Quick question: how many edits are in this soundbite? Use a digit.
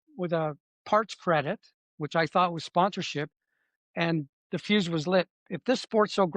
1